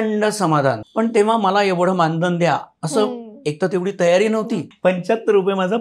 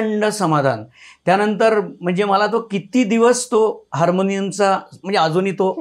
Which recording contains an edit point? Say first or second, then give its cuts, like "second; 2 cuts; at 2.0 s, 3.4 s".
first; 2 cuts; at 0.8 s, 4.7 s